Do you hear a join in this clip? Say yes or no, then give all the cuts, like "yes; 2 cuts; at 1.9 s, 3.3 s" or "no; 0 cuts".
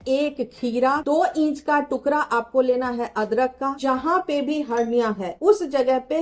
yes; 3 cuts; at 1.0 s, 3.8 s, 5.3 s